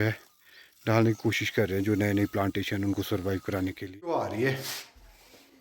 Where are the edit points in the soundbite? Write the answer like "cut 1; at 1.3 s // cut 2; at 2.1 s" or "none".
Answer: cut 1; at 4.1 s